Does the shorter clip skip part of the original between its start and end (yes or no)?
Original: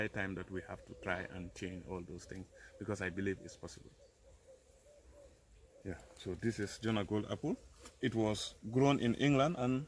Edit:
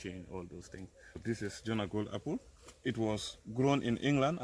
yes